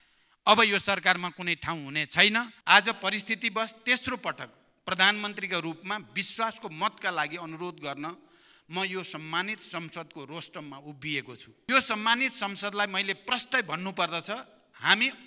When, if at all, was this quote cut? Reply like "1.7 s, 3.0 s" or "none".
2.5 s, 11.7 s